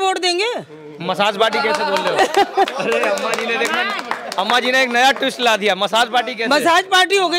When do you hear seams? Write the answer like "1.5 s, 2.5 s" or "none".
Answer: none

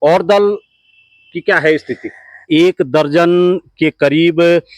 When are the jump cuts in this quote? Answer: 2.4 s

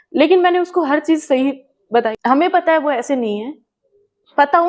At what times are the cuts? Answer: 2.1 s

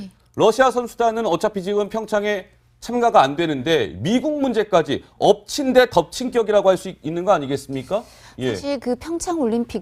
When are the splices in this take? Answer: none

